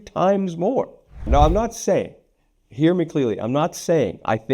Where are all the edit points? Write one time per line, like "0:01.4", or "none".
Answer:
0:01.3